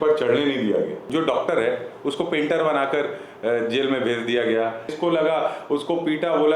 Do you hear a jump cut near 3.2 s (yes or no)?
no